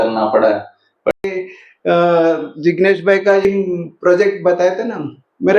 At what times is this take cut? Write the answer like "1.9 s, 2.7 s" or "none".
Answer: 1.1 s, 3.5 s